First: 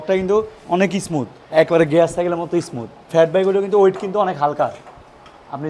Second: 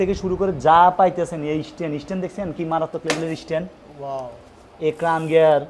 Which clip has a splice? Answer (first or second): first